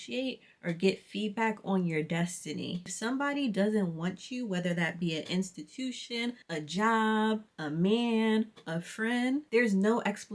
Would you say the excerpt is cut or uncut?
cut